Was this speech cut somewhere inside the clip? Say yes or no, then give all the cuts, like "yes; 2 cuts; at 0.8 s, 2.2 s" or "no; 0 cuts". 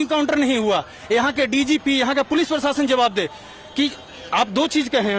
no; 0 cuts